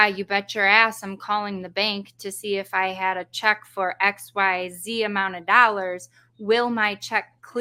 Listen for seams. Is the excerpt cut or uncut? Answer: uncut